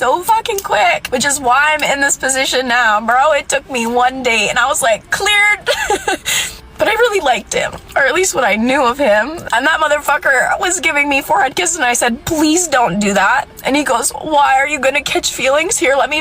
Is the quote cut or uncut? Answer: cut